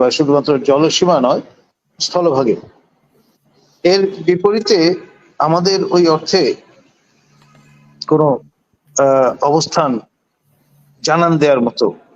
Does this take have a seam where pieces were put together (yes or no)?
no